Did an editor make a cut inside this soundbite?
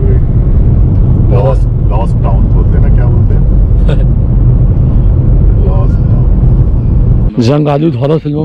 yes; 1 cut; at 7.2 s

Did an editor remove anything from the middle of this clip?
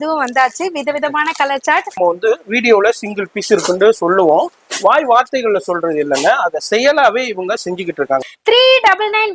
yes; 2 cuts; at 2.0 s, 8.2 s

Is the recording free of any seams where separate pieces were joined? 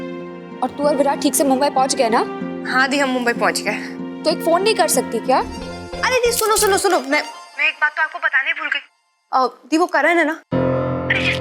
no; 1 cut; at 5.6 s

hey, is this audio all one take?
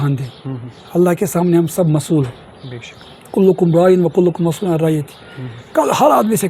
yes; 0 cuts

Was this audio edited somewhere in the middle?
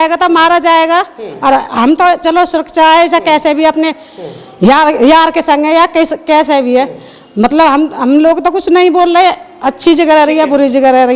no; 0 cuts

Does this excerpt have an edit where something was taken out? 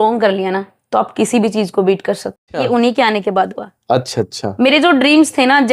yes; 1 cut; at 2.5 s

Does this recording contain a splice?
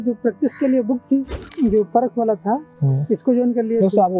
yes; 1 cut; at 1.4 s

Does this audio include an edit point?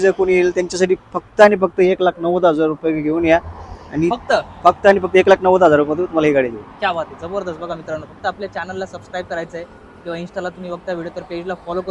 no; 0 cuts

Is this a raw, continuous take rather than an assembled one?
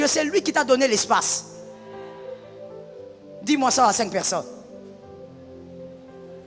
yes; 0 cuts

